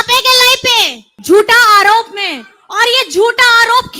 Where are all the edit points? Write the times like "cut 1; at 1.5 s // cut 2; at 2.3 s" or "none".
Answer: cut 1; at 1.1 s